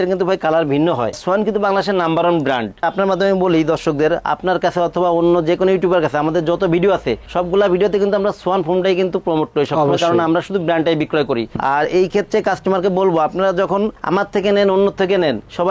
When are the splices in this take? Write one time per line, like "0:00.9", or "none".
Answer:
none